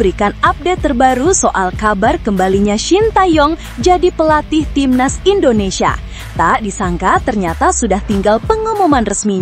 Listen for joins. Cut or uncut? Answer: uncut